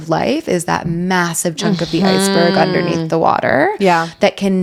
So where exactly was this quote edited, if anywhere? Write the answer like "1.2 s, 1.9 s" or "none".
none